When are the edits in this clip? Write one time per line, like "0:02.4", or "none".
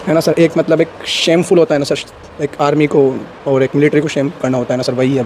none